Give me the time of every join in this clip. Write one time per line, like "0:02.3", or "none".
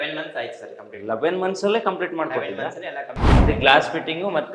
0:03.3